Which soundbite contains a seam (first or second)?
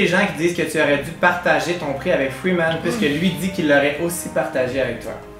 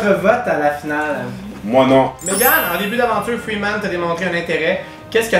second